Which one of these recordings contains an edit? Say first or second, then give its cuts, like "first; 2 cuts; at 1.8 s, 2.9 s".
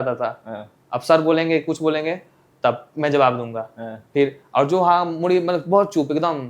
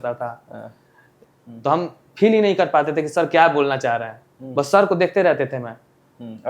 second; 1 cut; at 1.2 s